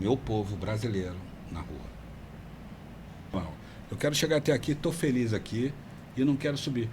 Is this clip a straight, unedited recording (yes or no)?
no